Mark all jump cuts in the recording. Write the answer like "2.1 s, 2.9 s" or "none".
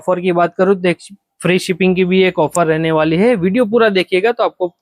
none